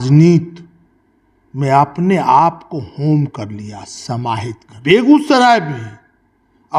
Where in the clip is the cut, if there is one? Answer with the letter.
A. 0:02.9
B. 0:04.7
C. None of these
B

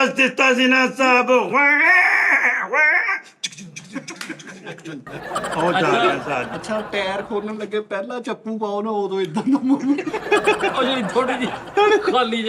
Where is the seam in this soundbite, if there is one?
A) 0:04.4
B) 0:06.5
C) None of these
B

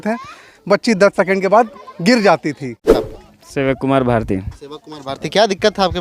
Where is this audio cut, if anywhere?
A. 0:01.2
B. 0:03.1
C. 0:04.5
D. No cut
B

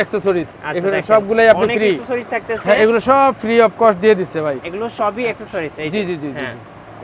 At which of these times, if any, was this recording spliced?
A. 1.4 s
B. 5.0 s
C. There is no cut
C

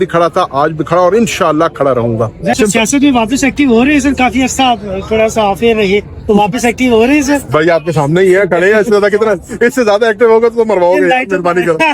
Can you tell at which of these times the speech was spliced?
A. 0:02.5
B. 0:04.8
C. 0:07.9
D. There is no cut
A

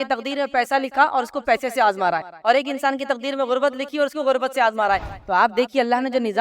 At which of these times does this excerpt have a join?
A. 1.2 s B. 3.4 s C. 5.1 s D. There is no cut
C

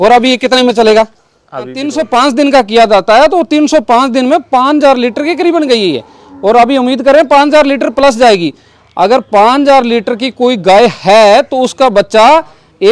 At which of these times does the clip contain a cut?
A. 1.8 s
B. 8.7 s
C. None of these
A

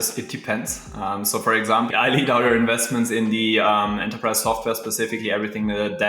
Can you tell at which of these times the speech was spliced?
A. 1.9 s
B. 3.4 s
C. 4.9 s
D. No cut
A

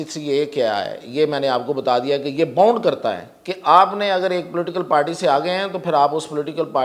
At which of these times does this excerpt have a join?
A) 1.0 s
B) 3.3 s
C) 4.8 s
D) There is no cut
D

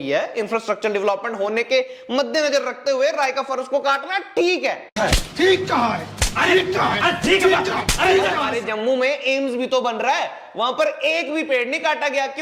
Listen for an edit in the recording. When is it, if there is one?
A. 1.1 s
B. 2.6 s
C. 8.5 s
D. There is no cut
C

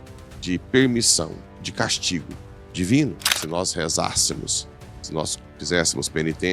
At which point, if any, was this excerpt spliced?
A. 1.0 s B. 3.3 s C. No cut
B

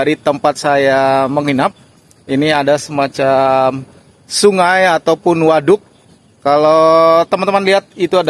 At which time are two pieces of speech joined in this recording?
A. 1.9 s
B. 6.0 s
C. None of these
C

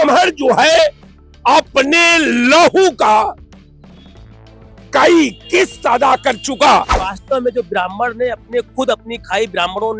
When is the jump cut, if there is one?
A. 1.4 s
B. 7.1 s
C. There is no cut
B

